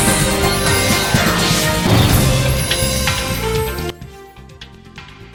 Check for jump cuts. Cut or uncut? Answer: uncut